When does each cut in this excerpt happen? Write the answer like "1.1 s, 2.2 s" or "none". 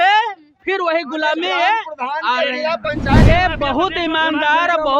3.3 s